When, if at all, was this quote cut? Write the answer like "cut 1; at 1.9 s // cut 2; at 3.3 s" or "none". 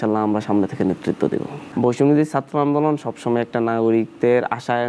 cut 1; at 1.6 s